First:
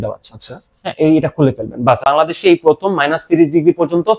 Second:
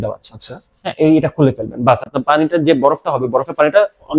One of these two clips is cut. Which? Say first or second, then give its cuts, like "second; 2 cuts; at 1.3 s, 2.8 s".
first; 1 cut; at 2.0 s